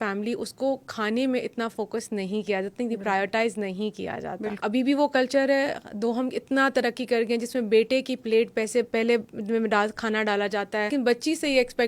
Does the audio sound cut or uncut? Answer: cut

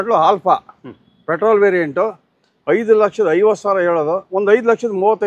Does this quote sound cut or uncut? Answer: uncut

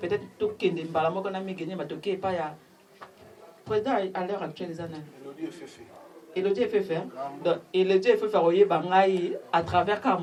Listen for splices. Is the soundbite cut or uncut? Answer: uncut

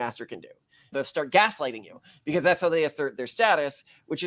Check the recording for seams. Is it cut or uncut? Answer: cut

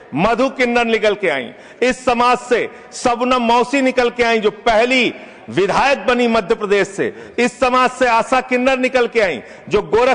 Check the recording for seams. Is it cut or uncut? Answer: uncut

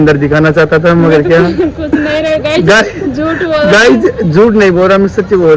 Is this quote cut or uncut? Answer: uncut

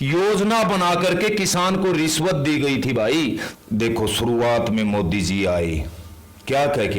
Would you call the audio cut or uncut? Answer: cut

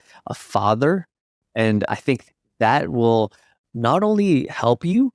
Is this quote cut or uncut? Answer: cut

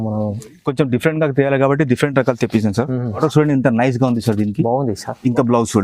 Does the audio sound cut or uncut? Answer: cut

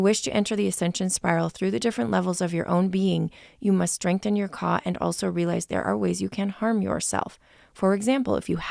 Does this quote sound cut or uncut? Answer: uncut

